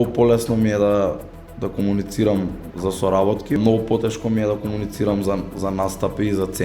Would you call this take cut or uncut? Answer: cut